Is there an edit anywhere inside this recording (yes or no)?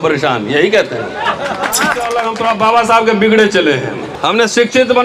yes